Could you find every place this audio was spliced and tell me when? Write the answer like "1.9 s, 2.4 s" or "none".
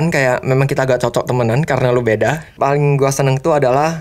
2.5 s